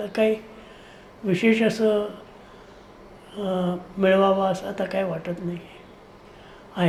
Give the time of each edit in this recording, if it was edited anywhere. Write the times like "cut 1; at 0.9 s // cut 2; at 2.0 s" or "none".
none